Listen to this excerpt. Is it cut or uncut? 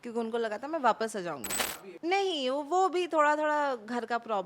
cut